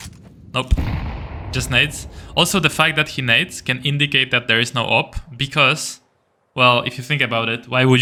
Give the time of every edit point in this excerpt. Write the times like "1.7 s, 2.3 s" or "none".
none